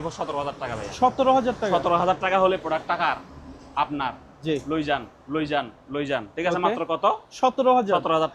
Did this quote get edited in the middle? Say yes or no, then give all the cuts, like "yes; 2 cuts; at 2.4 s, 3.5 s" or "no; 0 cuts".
no; 0 cuts